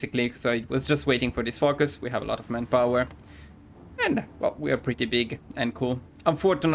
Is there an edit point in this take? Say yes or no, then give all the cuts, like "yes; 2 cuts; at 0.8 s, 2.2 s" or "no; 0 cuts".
no; 0 cuts